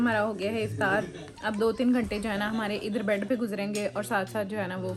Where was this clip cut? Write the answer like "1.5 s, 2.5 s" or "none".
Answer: none